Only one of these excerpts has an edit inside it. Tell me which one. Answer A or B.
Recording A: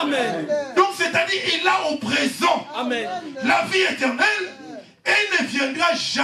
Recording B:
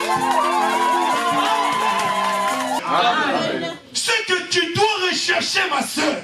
B